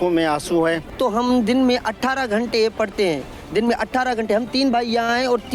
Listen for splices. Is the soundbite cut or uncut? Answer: cut